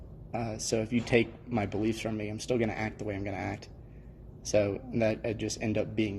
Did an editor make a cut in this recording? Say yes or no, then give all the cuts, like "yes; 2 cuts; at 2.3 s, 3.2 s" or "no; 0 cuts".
no; 0 cuts